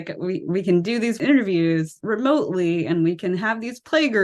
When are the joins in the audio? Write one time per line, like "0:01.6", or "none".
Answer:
0:01.2
0:02.0

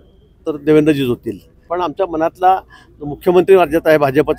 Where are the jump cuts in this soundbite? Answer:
0:01.6

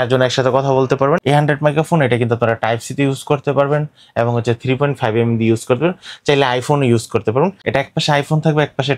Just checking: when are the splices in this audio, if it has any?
0:01.2
0:07.6

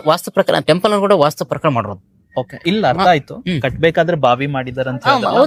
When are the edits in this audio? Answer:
none

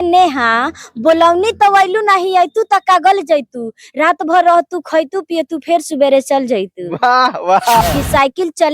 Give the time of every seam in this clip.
0:07.8

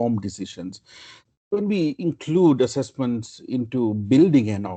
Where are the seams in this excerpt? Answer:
none

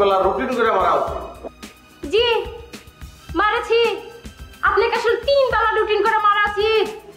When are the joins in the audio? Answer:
none

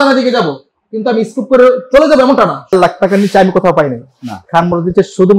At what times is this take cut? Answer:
0:02.7

